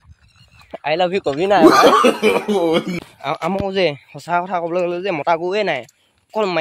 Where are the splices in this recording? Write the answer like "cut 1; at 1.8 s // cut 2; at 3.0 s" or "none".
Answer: cut 1; at 2.9 s